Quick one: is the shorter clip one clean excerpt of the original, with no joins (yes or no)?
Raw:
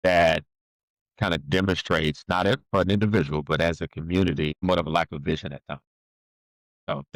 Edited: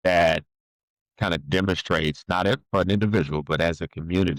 yes